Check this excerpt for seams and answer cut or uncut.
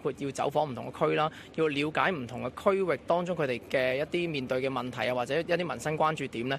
uncut